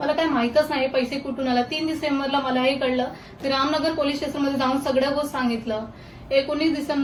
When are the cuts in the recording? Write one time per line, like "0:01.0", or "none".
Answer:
none